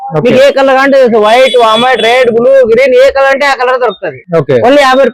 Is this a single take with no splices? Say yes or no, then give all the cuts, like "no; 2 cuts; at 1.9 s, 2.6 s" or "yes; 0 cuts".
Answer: yes; 0 cuts